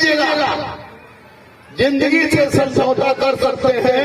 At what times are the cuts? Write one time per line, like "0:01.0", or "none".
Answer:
none